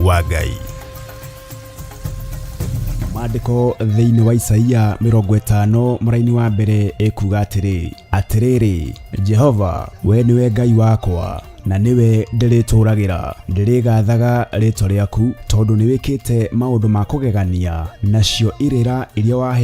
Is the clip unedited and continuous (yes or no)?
no